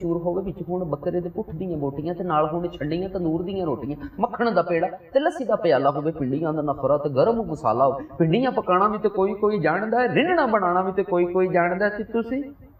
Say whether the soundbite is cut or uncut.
uncut